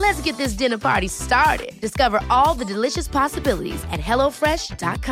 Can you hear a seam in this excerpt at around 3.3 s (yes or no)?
no